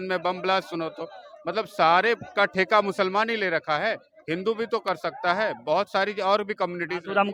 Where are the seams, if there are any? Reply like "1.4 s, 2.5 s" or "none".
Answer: none